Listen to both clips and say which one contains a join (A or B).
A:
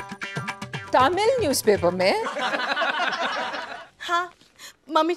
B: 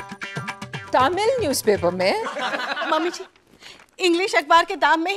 B